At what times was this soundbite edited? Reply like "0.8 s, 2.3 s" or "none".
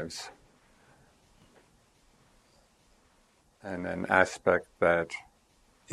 1.4 s